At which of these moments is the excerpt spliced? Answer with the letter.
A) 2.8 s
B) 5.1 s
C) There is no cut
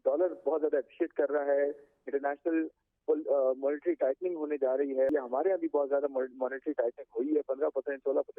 B